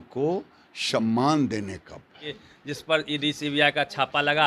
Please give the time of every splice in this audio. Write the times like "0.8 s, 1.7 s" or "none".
2.3 s